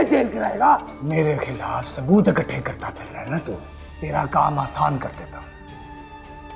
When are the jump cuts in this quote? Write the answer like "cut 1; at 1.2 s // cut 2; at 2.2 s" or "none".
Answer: cut 1; at 1.0 s // cut 2; at 3.8 s